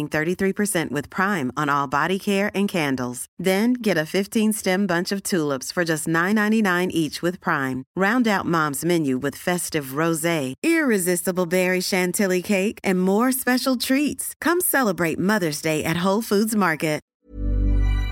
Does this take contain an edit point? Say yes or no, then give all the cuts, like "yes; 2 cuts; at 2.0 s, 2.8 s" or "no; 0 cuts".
yes; 1 cut; at 17.2 s